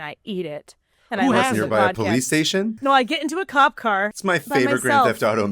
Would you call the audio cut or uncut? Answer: cut